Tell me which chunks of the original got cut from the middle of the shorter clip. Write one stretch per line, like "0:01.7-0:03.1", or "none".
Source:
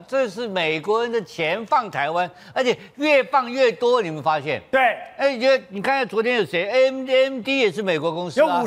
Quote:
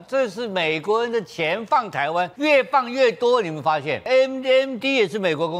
0:02.3-0:02.9
0:04.6-0:06.7